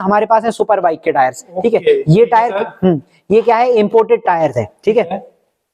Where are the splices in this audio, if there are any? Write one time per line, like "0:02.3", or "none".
none